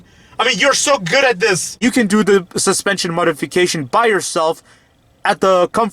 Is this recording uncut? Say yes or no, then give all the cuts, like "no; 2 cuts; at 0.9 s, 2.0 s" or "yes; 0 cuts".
no; 1 cut; at 1.7 s